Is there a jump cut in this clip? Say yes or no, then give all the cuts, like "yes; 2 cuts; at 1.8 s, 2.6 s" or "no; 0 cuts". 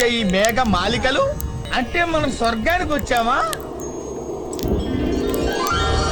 yes; 1 cut; at 1.5 s